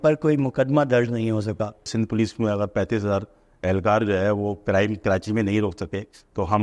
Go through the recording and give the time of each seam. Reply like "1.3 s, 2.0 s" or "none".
1.9 s